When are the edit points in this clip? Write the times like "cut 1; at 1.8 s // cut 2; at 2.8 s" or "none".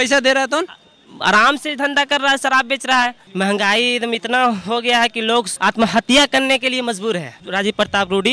cut 1; at 3.2 s // cut 2; at 5.5 s // cut 3; at 7.4 s